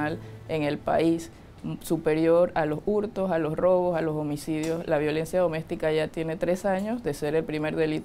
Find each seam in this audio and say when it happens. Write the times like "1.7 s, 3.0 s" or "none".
none